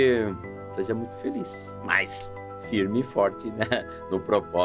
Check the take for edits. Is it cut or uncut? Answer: uncut